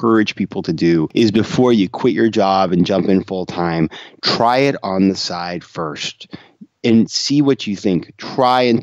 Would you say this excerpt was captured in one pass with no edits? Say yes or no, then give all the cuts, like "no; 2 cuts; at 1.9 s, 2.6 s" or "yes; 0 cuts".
no; 1 cut; at 1.1 s